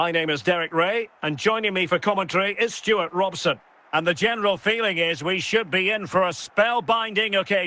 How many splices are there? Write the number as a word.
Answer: one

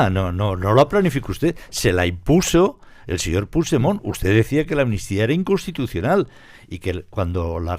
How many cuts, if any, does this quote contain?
zero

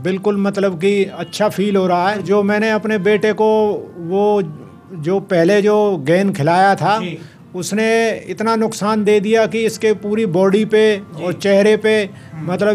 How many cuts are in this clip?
one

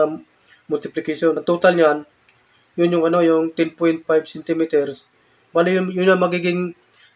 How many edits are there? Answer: one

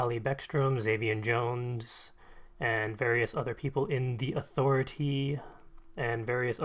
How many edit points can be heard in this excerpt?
one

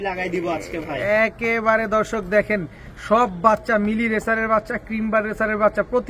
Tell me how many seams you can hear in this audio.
zero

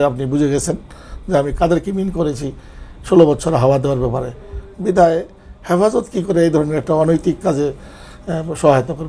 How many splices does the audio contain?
zero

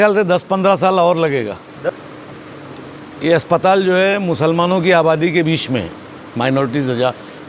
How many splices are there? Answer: one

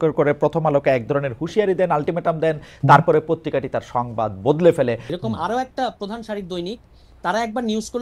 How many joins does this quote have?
one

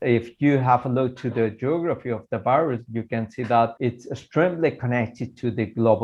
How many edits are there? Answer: one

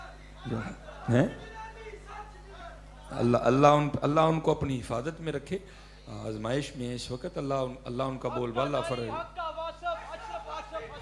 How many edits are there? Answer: zero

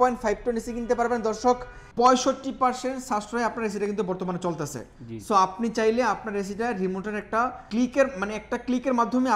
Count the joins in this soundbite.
two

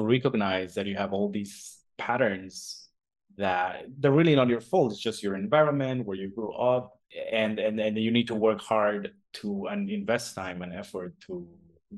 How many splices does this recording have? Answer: one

